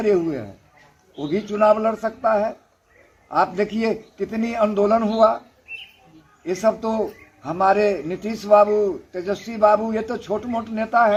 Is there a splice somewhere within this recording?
no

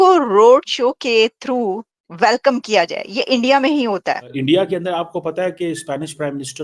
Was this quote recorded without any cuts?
no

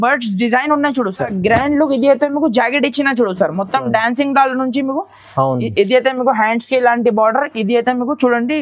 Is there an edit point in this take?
yes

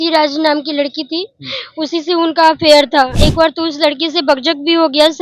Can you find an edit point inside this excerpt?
yes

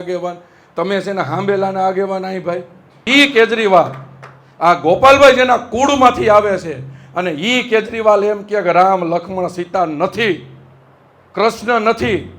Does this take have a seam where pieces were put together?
yes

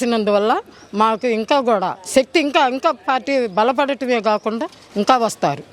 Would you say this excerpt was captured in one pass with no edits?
yes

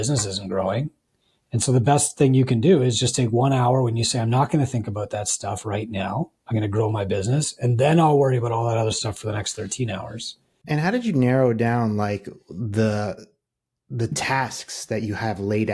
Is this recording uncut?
yes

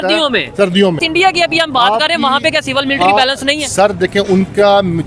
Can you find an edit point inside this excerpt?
yes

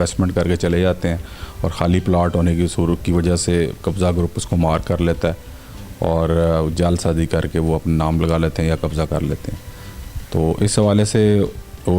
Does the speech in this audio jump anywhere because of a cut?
no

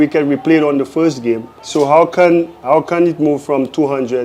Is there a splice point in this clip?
yes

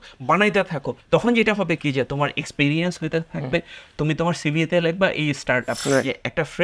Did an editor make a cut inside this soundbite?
yes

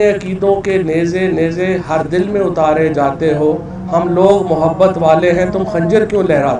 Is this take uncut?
yes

